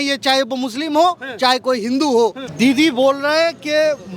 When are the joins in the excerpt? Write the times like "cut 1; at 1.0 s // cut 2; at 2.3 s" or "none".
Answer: cut 1; at 2.4 s